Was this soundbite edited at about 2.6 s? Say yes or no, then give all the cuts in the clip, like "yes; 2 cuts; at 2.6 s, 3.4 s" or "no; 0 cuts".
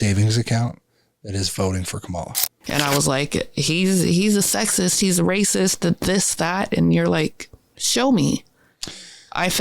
yes; 1 cut; at 2.6 s